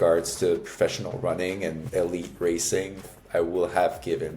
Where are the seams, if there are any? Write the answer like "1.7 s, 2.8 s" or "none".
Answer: 1.8 s, 3.1 s